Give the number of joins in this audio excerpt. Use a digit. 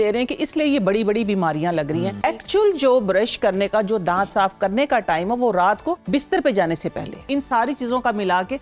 3